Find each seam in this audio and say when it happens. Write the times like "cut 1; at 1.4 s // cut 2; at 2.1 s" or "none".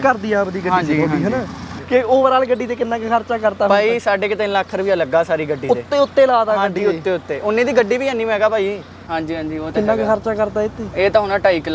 cut 1; at 1.7 s // cut 2; at 9.0 s